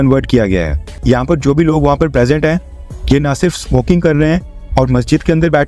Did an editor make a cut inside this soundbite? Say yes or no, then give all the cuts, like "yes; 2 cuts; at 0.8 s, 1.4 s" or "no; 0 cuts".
yes; 1 cut; at 0.9 s